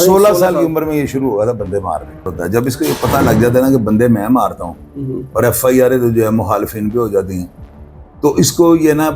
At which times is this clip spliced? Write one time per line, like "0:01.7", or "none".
0:02.3